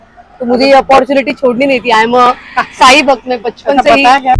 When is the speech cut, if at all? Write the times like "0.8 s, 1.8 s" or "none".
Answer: none

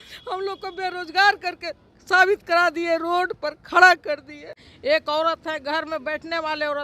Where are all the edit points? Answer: 4.7 s

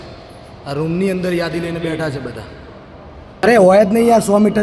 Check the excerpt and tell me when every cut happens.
3.4 s

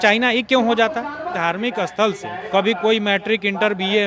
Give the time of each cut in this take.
1.4 s, 2.4 s

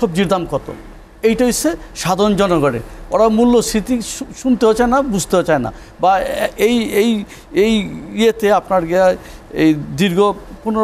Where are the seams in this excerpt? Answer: none

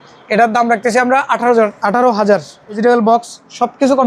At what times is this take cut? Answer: 2.8 s

